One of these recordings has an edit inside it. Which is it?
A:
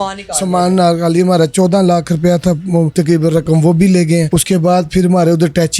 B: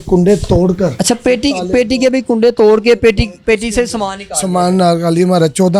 A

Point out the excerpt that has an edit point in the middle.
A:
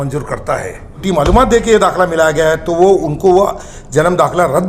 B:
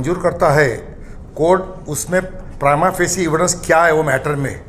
A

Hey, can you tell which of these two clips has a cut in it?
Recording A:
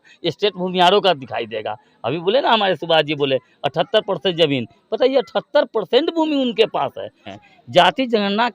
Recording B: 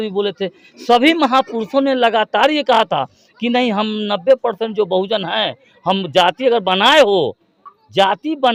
A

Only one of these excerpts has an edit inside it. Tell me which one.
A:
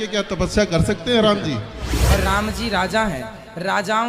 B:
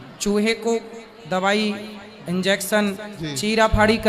A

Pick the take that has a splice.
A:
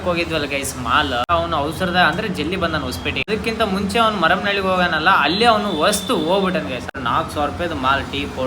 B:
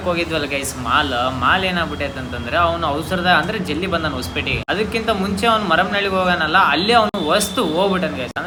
A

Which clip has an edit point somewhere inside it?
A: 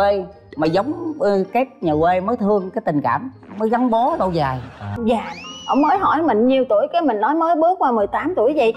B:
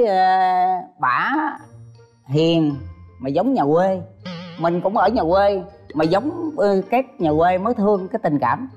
A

